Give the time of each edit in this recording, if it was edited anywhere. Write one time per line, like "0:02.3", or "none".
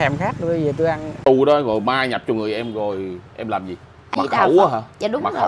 0:01.1
0:04.1